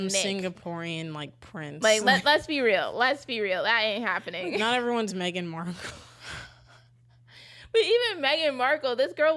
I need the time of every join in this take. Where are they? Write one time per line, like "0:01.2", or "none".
none